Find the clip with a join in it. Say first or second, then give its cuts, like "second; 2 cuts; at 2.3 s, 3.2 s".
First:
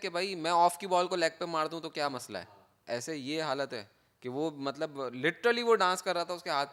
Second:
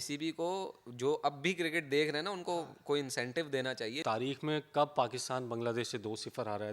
second; 1 cut; at 4.0 s